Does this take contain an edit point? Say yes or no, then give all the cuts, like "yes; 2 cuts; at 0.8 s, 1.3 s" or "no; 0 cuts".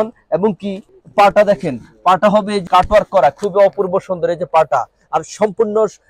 yes; 2 cuts; at 0.9 s, 2.7 s